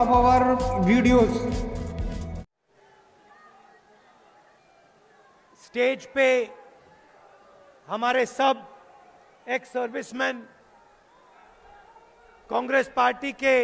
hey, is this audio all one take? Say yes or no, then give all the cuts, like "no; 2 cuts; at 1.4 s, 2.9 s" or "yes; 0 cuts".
no; 1 cut; at 2.7 s